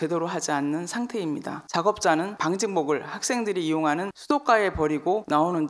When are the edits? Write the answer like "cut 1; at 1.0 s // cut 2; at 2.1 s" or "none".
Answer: cut 1; at 1.7 s